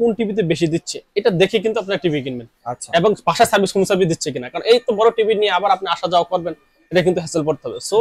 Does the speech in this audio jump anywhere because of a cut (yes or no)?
no